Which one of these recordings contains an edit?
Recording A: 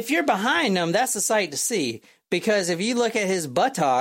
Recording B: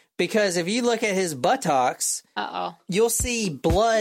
B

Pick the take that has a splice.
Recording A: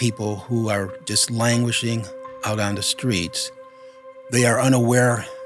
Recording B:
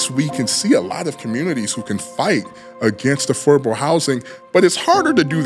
A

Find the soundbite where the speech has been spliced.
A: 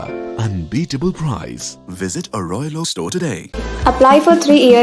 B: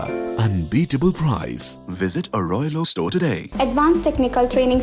B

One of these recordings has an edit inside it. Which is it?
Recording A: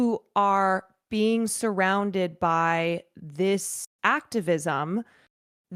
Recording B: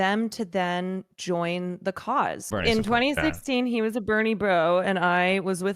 B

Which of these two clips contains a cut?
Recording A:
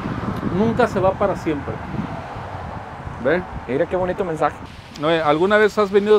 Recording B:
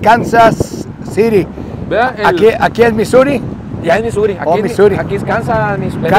A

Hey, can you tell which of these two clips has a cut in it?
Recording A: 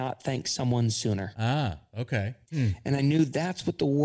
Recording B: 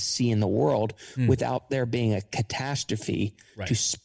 A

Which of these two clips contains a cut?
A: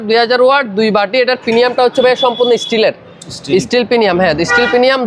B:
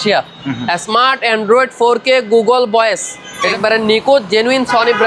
B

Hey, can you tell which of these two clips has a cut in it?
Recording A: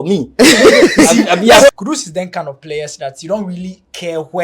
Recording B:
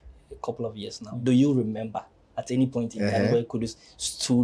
A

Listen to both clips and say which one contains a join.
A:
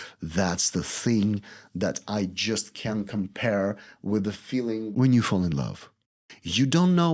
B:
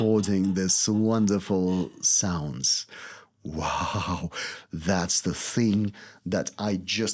A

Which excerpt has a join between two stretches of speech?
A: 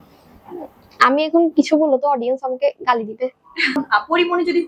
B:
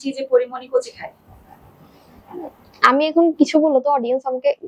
A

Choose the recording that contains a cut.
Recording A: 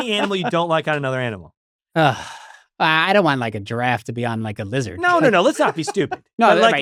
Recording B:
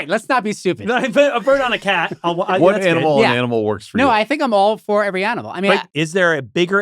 B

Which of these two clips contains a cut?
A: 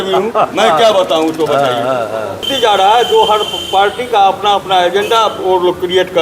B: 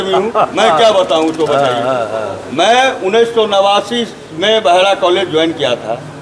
A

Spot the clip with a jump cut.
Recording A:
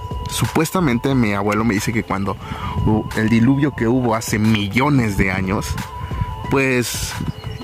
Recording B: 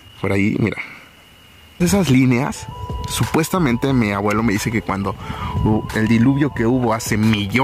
B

